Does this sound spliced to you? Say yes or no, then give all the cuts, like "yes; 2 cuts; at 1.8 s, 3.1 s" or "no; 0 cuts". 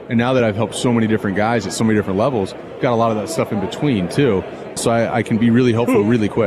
yes; 1 cut; at 4.8 s